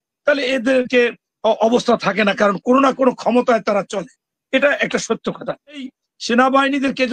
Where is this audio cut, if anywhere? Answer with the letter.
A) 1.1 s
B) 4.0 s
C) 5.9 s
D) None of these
C